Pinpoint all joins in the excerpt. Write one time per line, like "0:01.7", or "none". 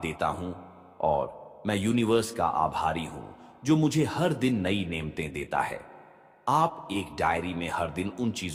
none